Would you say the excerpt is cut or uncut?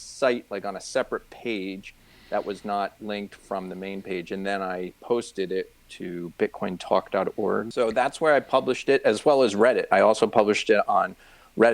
cut